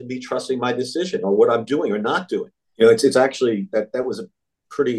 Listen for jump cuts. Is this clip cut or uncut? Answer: cut